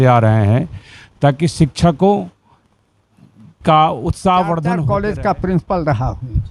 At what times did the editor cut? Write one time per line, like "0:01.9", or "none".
0:04.8